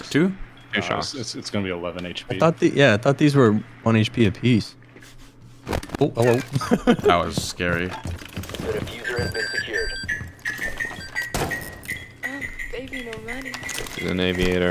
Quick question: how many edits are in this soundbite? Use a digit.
0